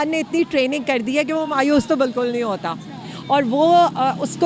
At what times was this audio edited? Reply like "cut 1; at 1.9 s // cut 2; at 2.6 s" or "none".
none